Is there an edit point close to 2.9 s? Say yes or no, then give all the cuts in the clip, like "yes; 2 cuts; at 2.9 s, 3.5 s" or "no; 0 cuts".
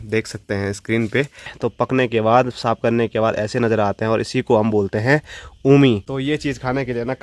no; 2 cuts; at 1.5 s, 6.1 s